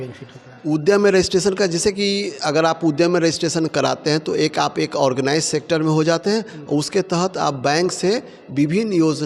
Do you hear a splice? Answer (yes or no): no